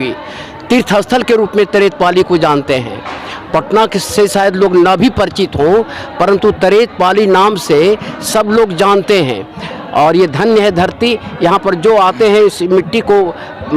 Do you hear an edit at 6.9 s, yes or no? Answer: no